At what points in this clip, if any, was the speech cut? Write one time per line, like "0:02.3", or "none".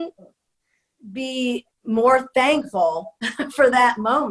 0:01.7